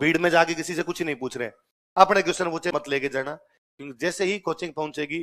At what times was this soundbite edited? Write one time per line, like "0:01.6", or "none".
0:02.8